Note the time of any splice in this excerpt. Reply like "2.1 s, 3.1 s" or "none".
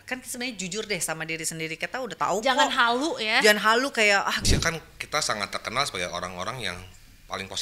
4.4 s